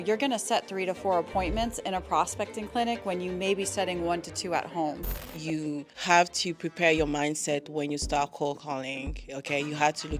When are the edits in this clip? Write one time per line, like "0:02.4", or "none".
0:05.4

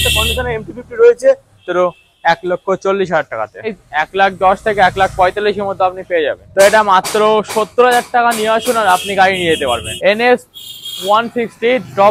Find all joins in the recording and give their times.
0:01.6
0:03.8
0:06.4
0:09.9

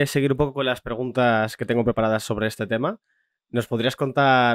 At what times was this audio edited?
none

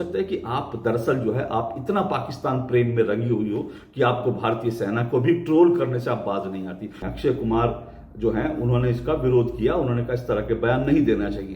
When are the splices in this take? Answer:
0:06.9

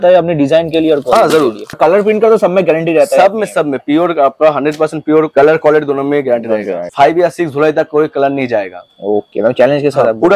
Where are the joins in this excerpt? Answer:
0:01.8
0:06.9

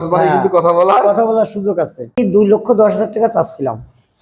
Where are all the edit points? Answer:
0:02.2

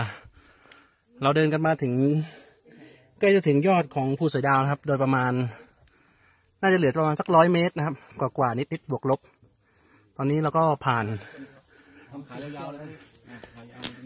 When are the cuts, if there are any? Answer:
none

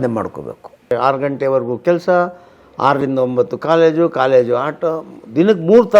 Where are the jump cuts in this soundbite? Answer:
0:00.9

